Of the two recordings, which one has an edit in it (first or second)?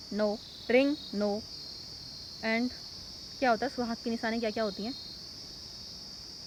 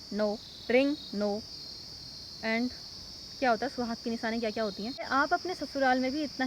second